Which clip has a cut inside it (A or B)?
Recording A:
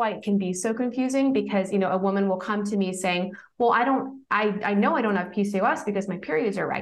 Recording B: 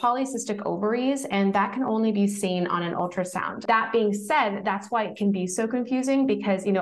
B